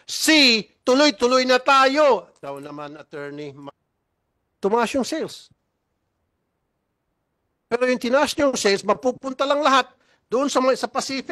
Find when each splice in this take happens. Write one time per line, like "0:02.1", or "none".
0:03.7